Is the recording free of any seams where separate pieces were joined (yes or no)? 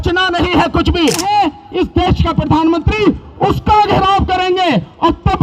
no